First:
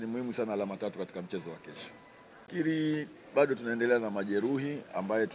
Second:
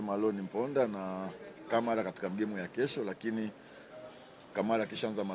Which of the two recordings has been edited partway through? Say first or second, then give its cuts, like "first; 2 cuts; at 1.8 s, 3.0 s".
first; 1 cut; at 2.5 s